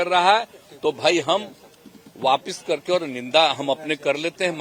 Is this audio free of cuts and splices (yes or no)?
yes